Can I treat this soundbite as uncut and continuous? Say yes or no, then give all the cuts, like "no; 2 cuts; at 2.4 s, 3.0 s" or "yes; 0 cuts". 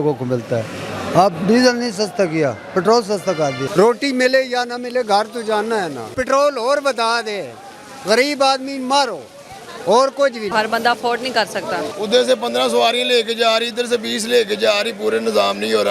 no; 4 cuts; at 3.6 s, 6.1 s, 10.5 s, 11.9 s